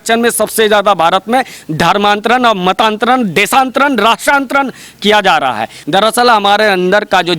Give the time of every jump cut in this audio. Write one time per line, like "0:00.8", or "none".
0:05.8